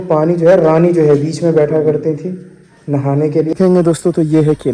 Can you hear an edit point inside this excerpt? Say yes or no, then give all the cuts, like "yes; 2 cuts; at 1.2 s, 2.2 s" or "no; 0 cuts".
yes; 1 cut; at 3.6 s